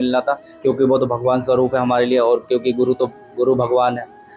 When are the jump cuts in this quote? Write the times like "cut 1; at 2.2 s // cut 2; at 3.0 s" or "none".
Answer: none